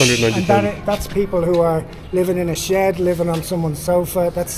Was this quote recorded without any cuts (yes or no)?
yes